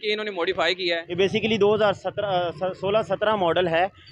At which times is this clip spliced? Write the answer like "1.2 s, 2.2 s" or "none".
1.2 s